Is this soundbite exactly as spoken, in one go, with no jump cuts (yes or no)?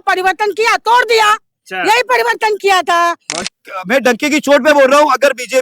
no